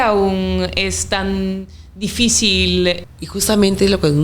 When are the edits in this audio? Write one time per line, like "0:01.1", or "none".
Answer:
0:03.0